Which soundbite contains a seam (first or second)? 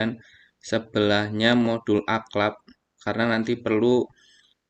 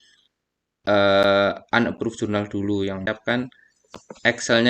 second